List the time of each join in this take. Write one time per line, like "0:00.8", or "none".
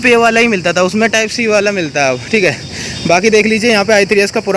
none